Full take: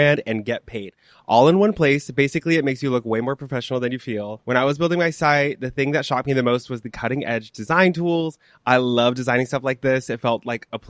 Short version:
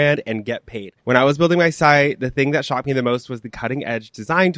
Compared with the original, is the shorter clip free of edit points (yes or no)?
no